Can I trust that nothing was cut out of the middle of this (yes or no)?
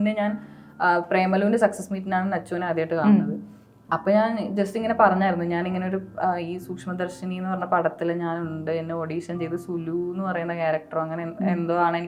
yes